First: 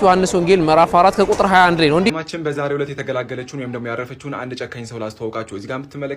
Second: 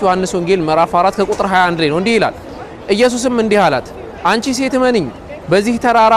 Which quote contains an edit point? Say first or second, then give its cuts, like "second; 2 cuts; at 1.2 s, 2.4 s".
first; 1 cut; at 2.1 s